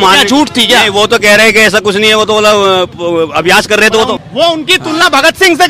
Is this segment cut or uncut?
cut